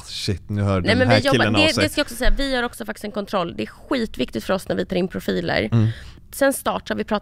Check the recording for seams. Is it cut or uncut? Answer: cut